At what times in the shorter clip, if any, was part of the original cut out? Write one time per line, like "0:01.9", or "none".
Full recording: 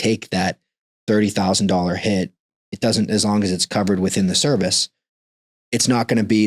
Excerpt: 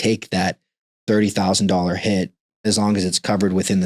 0:02.6